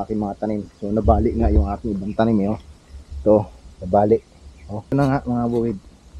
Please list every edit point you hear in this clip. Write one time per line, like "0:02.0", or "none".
0:04.9